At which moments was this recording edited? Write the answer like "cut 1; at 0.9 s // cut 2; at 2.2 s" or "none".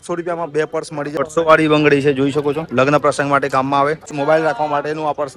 cut 1; at 1.2 s // cut 2; at 4.2 s